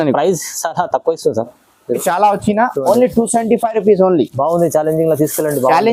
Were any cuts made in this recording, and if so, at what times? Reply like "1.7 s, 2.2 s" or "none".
2.0 s